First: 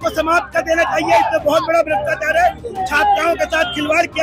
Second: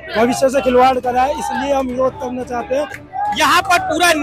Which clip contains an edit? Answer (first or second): second